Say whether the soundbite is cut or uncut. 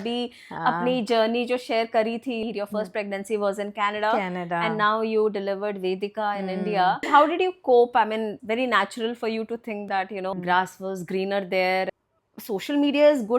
cut